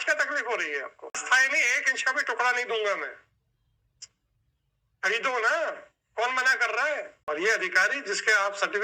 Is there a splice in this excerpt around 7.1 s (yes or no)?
yes